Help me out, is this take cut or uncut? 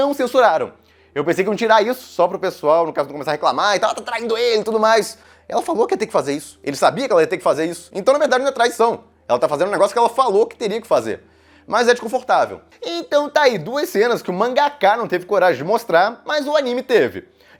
uncut